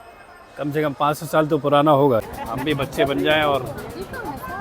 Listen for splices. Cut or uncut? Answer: cut